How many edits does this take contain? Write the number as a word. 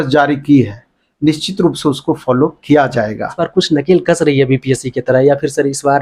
one